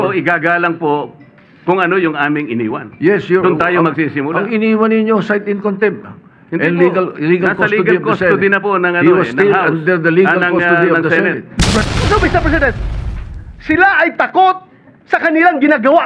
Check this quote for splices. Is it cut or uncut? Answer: cut